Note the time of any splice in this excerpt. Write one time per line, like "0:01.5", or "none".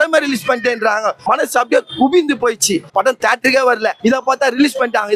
0:02.9
0:04.0